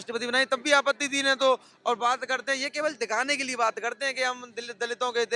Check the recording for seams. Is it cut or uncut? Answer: uncut